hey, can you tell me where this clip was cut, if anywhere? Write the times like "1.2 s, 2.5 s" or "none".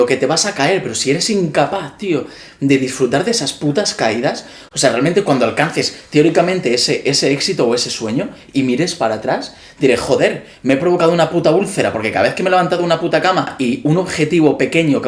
13.5 s